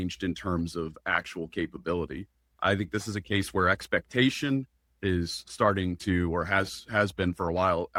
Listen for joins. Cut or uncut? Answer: uncut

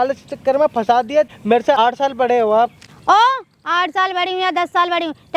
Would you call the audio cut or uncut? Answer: cut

